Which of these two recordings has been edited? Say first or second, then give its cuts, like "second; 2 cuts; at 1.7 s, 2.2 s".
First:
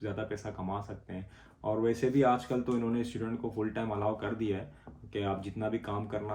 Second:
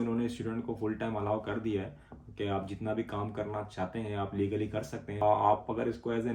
second; 1 cut; at 5.1 s